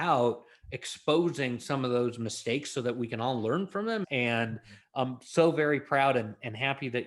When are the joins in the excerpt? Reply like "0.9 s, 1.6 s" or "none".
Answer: 4.0 s